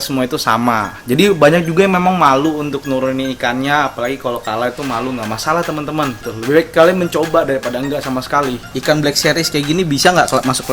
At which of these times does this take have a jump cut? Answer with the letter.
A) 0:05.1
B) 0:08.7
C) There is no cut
B